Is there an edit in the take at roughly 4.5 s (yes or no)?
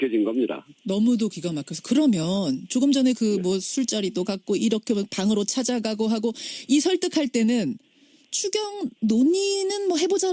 no